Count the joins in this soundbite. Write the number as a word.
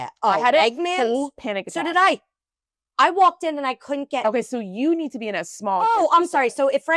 zero